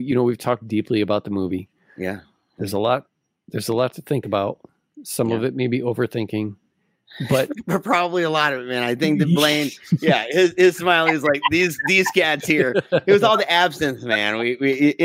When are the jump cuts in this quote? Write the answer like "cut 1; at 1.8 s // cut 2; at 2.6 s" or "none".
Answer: none